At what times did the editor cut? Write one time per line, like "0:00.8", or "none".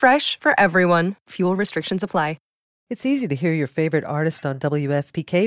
0:02.7